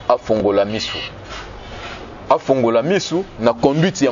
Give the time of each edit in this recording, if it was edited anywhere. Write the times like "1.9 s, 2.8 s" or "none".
none